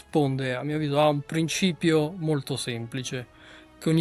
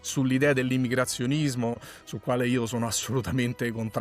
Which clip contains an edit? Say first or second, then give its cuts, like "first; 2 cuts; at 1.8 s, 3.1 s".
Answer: second; 1 cut; at 1.9 s